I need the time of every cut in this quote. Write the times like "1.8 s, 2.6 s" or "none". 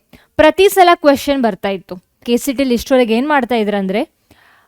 2.2 s